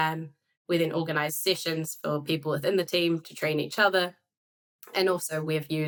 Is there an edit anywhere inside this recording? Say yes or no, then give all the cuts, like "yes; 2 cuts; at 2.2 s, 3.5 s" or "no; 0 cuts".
no; 0 cuts